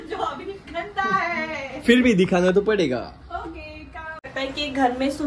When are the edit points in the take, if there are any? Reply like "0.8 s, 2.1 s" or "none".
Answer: 4.3 s